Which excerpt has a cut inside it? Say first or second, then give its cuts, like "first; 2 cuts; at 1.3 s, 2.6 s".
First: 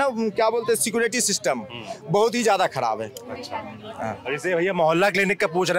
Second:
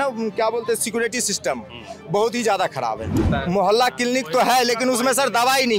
second; 1 cut; at 3.2 s